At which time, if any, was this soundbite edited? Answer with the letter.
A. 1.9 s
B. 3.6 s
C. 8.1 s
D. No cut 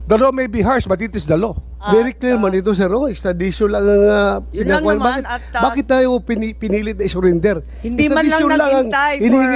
A